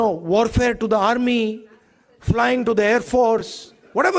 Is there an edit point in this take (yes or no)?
no